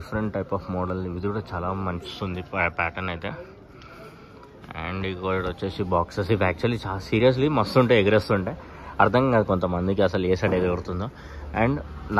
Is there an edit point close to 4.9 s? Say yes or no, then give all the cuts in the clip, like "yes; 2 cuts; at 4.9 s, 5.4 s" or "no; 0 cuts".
no; 0 cuts